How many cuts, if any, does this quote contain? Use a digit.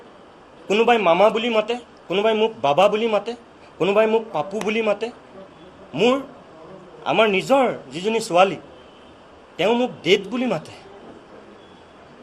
0